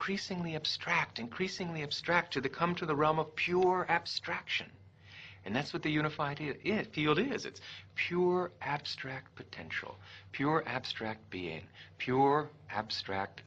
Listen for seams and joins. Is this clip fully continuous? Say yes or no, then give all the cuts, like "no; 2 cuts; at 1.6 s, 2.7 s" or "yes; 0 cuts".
yes; 0 cuts